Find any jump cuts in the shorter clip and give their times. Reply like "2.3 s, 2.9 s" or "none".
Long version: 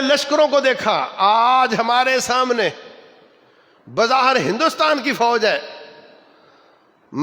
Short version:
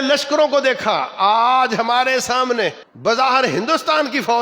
2.9 s